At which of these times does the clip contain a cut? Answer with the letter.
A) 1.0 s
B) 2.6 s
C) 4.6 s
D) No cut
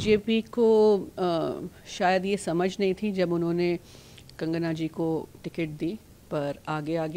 D